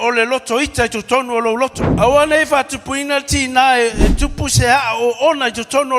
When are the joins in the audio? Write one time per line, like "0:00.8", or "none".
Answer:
0:01.8